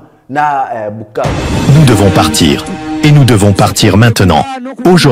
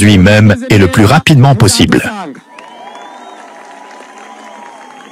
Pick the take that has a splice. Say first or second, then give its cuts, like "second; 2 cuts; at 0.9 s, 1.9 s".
first; 1 cut; at 1.6 s